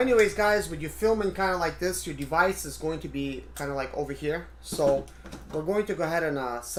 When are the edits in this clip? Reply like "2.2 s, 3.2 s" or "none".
none

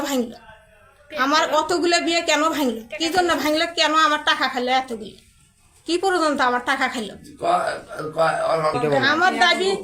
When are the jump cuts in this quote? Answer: none

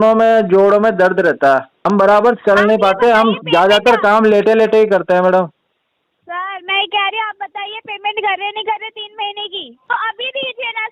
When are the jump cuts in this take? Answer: 1.8 s, 9.7 s

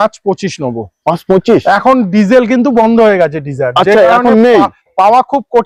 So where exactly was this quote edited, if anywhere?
none

